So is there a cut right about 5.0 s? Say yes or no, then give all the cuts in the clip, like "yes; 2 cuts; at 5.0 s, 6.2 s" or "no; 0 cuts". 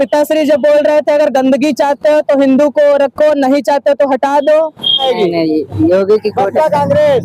yes; 1 cut; at 5.0 s